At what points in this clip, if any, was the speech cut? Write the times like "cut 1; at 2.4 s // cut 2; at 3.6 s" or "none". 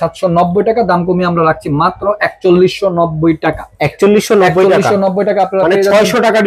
none